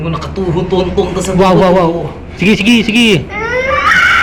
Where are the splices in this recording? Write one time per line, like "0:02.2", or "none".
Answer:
none

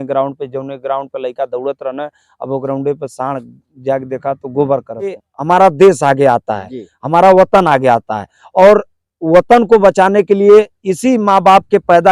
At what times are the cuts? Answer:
0:05.3

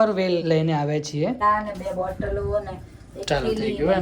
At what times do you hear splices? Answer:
0:01.4

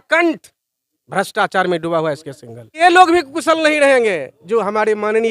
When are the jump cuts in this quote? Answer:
0:02.8

